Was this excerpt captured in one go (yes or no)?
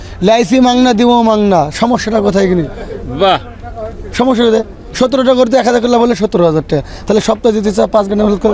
yes